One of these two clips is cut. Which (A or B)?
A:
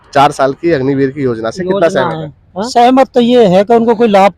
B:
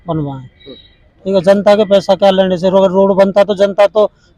A